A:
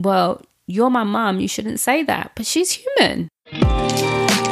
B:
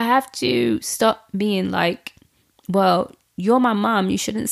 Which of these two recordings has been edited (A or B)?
A